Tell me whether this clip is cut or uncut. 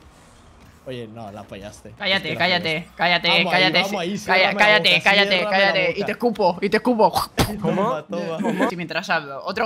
cut